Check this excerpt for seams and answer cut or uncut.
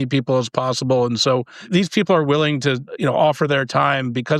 cut